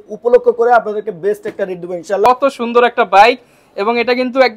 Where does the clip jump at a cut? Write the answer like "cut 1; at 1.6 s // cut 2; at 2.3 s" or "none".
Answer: cut 1; at 2.3 s